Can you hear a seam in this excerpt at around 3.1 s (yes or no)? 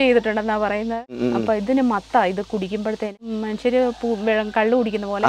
yes